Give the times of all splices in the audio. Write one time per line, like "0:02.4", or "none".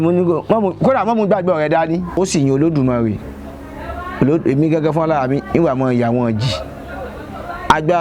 0:02.2